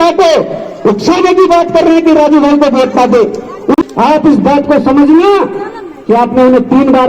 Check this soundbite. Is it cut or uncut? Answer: cut